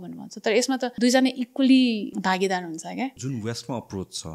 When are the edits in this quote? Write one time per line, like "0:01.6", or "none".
0:00.9
0:02.1
0:03.2